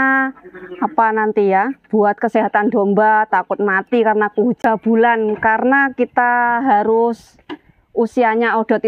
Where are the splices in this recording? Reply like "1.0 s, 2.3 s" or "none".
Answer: 4.6 s